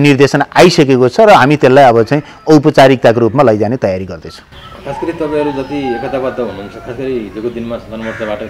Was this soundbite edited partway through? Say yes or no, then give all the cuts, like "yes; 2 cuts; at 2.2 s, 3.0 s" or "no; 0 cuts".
no; 0 cuts